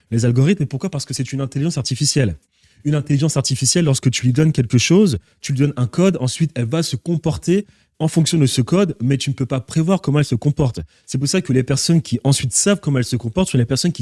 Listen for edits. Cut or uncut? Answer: uncut